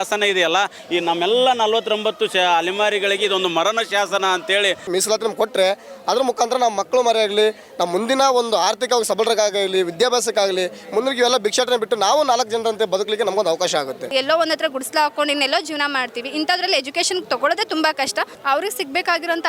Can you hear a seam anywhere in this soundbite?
yes; 3 cuts; at 4.8 s, 14.1 s, 18.3 s

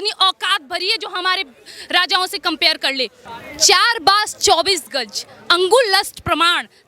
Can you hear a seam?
yes; 1 cut; at 3.3 s

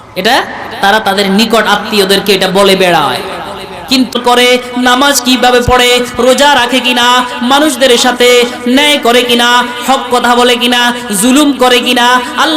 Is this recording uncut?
no; 1 cut; at 4.1 s

